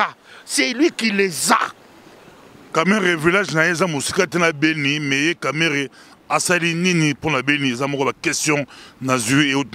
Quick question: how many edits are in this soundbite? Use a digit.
0